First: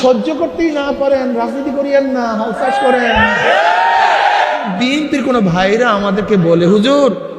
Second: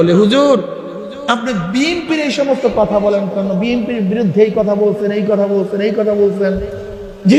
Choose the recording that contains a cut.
first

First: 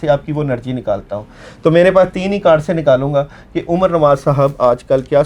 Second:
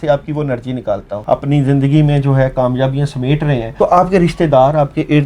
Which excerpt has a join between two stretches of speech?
second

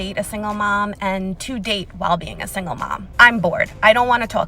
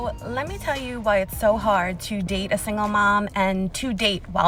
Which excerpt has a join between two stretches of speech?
first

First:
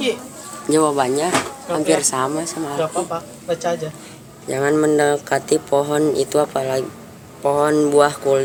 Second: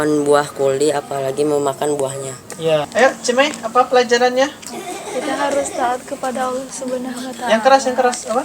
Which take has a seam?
second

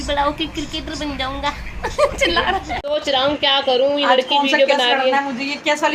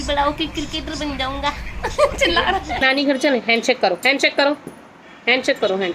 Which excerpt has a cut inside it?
second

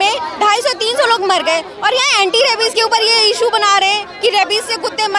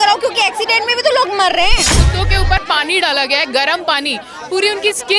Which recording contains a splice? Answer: second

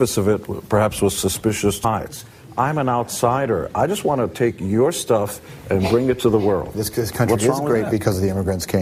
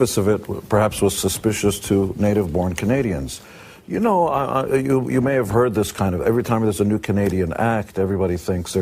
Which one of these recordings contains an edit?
second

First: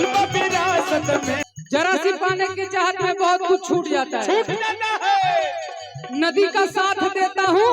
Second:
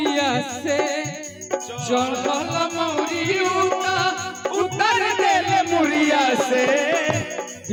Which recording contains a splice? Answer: first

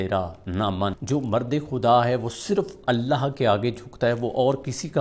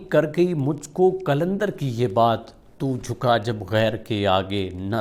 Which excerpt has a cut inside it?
first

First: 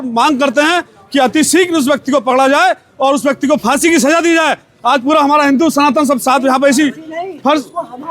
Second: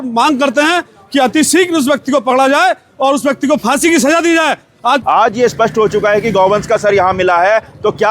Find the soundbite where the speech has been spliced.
second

